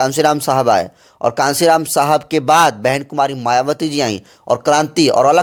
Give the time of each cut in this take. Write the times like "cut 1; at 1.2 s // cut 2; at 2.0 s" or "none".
none